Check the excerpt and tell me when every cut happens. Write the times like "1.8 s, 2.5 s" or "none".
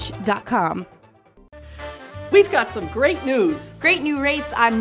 1.4 s